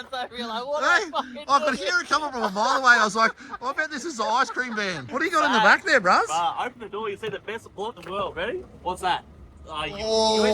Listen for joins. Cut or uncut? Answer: uncut